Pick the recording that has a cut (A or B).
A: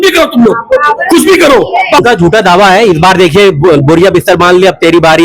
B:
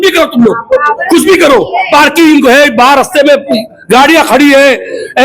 A